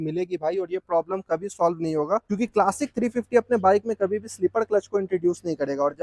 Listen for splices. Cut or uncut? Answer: uncut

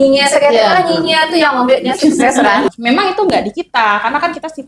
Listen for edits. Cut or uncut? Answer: cut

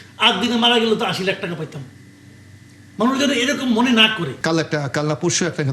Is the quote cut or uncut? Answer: cut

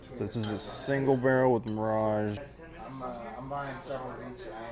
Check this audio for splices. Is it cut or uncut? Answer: cut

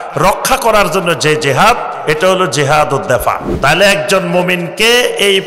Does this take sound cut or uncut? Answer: cut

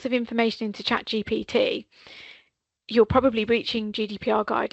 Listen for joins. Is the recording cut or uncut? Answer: uncut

